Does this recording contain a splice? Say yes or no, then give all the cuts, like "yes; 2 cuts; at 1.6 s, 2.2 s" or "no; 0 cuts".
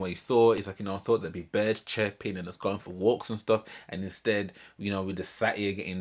no; 0 cuts